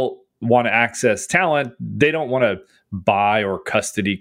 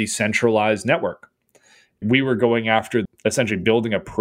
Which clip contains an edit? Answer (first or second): second